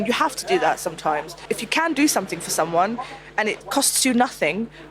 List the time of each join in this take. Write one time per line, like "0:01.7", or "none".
0:01.4
0:03.6